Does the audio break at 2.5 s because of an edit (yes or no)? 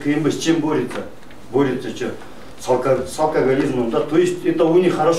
no